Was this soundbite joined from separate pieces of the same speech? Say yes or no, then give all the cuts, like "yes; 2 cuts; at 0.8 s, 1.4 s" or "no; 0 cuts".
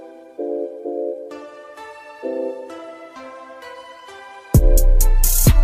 no; 0 cuts